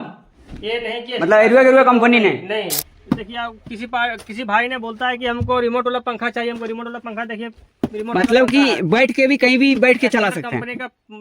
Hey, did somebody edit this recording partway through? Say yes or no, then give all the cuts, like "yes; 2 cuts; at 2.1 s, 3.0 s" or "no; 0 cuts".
yes; 1 cut; at 2.8 s